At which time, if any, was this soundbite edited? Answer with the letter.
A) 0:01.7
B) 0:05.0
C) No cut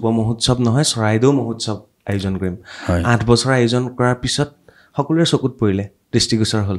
C